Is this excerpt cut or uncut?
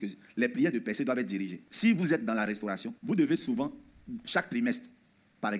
cut